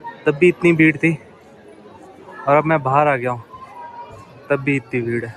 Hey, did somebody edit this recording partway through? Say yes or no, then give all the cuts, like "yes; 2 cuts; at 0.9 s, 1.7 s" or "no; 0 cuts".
no; 0 cuts